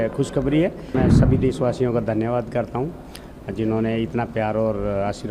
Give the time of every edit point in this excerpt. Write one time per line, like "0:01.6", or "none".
0:00.9